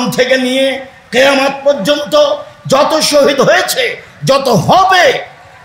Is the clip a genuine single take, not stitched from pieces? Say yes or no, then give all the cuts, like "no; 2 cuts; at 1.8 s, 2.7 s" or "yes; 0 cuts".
yes; 0 cuts